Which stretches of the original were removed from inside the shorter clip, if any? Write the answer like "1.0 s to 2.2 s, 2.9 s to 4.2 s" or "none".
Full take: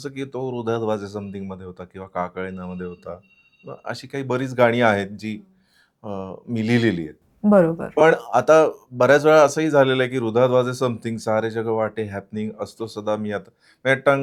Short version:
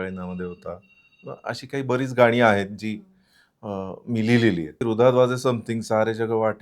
7.2 s to 10.2 s